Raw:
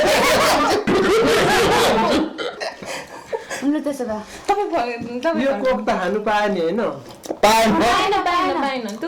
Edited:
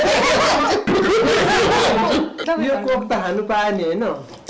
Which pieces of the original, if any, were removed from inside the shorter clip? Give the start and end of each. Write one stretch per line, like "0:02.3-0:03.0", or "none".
0:02.4-0:05.2